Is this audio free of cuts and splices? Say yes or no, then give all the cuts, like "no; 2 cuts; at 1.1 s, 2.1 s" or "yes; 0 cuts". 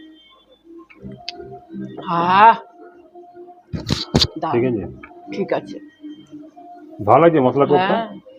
yes; 0 cuts